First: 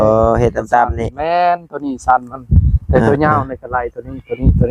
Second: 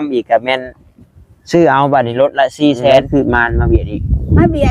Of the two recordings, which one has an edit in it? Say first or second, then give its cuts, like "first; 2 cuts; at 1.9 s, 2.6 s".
second; 1 cut; at 3.1 s